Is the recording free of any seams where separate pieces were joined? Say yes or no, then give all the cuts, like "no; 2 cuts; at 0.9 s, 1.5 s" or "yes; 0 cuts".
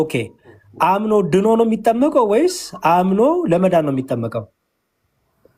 yes; 0 cuts